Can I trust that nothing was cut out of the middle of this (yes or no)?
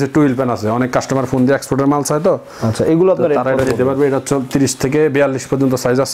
yes